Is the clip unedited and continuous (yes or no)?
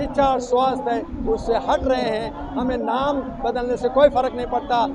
yes